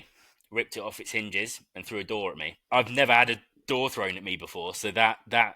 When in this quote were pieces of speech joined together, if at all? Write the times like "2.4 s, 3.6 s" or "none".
2.6 s